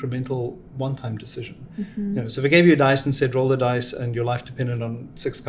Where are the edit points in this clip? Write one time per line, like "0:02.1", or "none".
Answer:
none